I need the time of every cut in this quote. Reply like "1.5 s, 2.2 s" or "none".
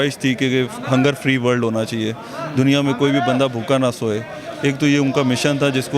none